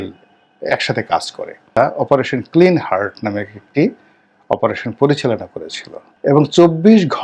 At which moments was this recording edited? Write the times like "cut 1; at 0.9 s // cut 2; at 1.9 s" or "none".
cut 1; at 1.8 s